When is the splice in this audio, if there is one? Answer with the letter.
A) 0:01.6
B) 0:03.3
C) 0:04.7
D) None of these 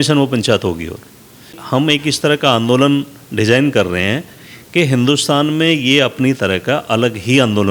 A